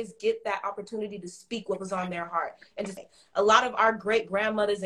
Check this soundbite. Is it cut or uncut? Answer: cut